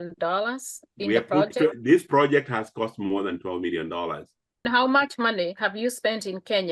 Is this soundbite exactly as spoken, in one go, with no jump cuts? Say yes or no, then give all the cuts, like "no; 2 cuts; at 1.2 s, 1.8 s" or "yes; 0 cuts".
no; 1 cut; at 4.6 s